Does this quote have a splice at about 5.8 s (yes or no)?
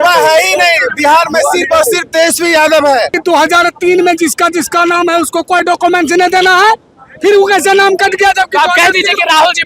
no